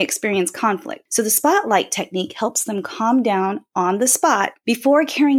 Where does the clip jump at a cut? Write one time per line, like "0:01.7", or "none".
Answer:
0:01.0
0:04.6